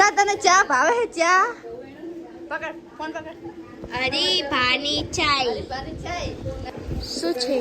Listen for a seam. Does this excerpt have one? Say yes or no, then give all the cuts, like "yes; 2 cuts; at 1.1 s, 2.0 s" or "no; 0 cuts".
yes; 1 cut; at 6.6 s